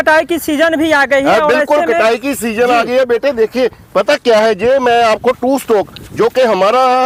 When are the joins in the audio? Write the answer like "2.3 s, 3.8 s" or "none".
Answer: none

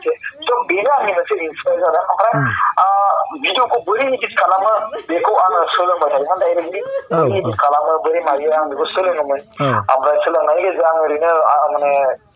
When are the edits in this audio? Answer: none

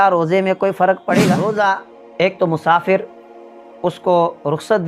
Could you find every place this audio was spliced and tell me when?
1.5 s

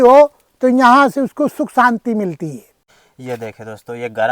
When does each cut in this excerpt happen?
2.7 s

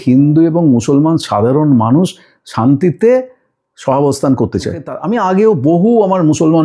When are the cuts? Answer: 5.0 s

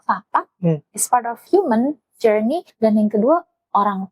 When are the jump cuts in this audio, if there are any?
1.4 s, 2.7 s

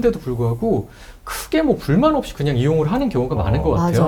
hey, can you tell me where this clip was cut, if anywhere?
none

